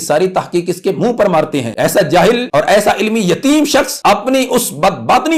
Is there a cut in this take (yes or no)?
yes